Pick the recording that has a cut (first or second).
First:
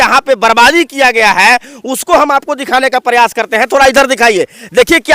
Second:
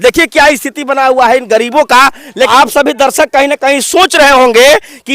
second